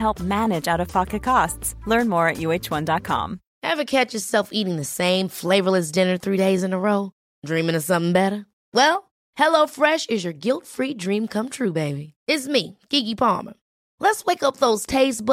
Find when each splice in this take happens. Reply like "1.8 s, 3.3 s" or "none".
3.4 s